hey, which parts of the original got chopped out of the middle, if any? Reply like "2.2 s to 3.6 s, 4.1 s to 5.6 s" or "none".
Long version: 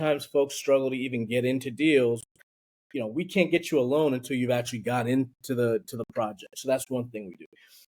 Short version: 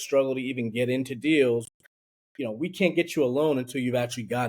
none